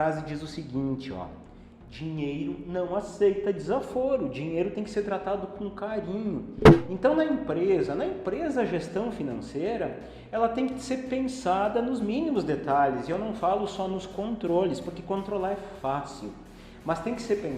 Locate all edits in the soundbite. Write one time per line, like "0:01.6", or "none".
none